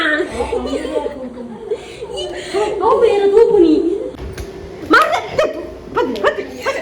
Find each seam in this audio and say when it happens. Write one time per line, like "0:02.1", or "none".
0:04.1

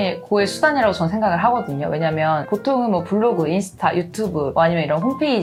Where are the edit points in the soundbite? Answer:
none

